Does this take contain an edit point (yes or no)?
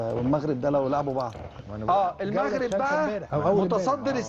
yes